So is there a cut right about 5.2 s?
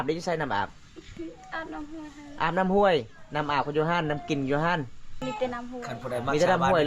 yes; 1 cut; at 5.2 s

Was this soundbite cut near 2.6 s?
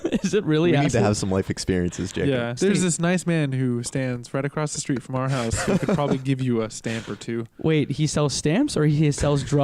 yes; 1 cut; at 2.6 s

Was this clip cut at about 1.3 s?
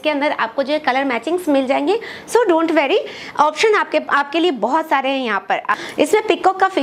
no; 1 cut; at 5.8 s

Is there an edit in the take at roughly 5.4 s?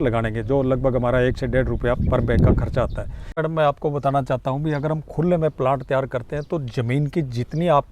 no; 1 cut; at 3.4 s

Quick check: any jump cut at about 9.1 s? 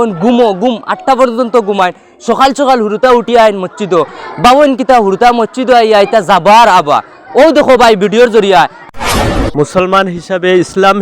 yes; 1 cut; at 9.1 s

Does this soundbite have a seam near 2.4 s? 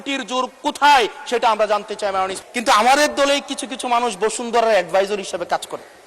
yes; 1 cut; at 2.4 s

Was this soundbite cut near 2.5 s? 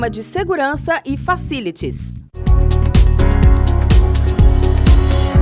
yes; 1 cut; at 2.5 s

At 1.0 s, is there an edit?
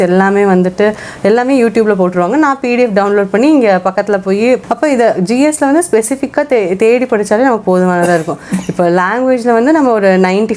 no; 1 cut; at 4.6 s

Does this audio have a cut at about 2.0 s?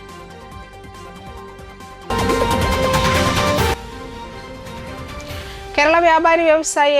yes; 1 cut; at 2.0 s

